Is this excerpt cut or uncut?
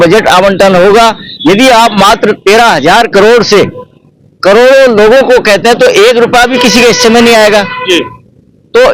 uncut